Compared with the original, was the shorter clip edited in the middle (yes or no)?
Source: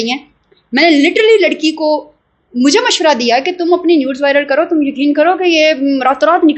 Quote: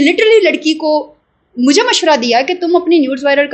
no